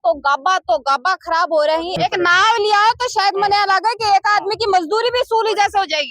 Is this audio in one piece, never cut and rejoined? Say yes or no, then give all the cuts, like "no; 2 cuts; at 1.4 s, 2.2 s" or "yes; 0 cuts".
no; 1 cut; at 2.0 s